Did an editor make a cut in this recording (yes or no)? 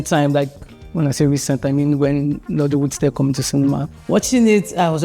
yes